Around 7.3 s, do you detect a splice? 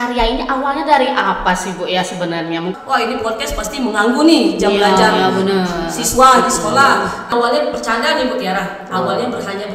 yes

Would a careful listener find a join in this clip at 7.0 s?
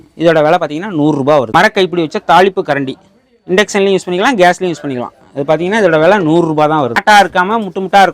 yes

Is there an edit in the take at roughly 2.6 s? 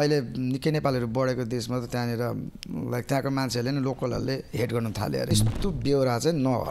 no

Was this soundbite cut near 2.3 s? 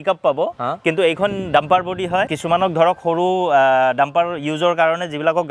no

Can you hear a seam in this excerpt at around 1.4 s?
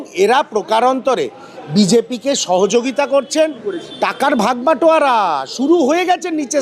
no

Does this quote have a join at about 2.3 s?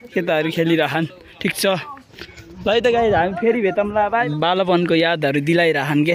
no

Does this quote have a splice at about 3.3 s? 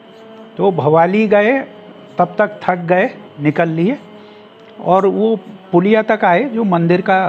yes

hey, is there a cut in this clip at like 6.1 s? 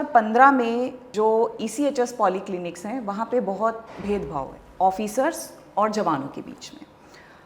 no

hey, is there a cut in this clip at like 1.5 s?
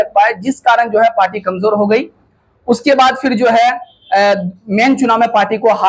no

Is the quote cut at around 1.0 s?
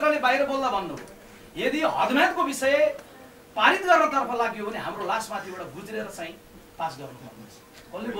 no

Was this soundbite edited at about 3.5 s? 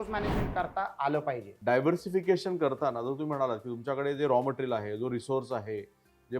no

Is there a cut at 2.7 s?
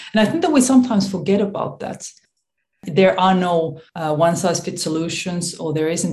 yes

